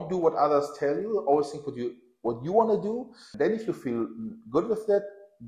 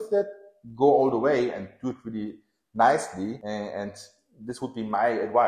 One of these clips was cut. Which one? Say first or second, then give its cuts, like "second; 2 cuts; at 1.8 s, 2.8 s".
first; 1 cut; at 3.2 s